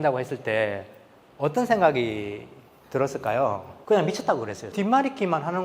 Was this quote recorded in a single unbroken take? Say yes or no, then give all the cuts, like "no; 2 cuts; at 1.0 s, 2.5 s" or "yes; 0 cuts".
no; 2 cuts; at 3.7 s, 4.7 s